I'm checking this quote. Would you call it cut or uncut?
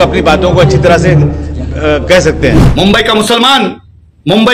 cut